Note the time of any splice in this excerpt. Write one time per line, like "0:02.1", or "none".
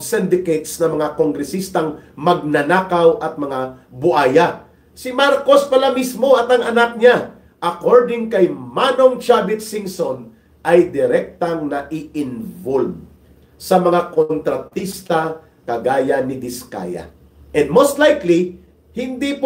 none